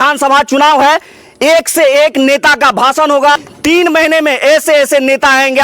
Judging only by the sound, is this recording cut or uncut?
cut